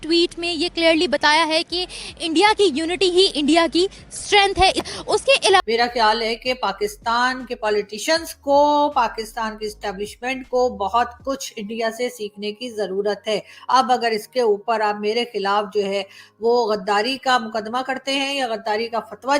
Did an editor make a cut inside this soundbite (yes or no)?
yes